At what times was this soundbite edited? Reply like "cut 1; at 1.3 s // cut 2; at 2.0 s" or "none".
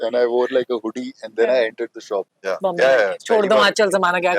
cut 1; at 2.3 s